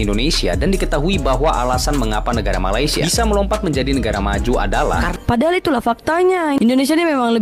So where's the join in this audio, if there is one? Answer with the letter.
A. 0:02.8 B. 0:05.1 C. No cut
B